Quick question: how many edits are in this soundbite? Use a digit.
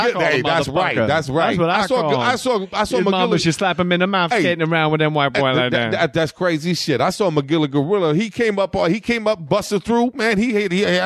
1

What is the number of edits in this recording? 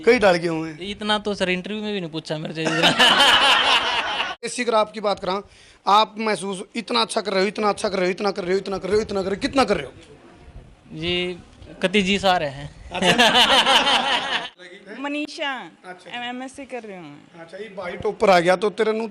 2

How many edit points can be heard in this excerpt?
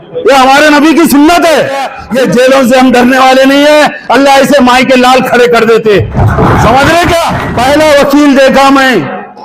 2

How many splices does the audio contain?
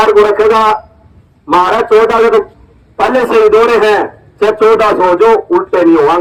0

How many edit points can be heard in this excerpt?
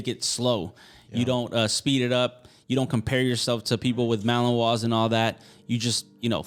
0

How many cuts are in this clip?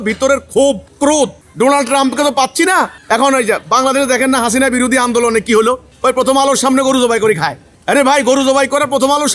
2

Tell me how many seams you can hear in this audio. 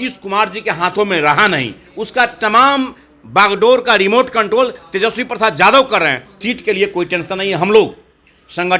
1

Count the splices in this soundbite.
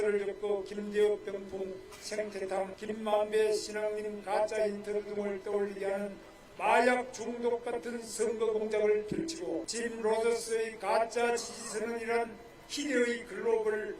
2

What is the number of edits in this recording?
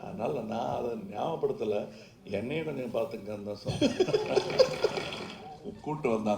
1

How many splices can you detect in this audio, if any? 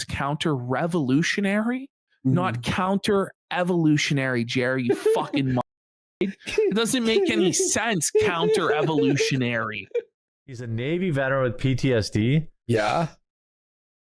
1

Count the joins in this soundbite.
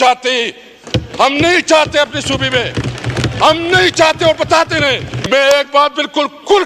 1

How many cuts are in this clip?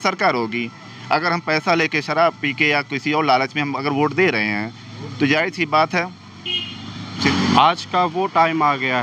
1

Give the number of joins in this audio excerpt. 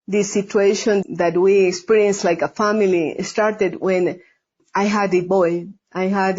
1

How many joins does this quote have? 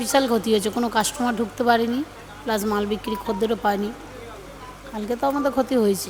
0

